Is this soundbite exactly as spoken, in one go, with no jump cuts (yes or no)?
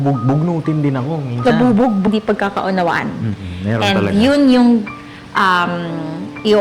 no